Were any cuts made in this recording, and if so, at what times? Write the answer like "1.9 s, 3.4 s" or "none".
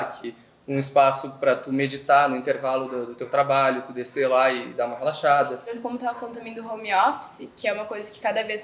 5.8 s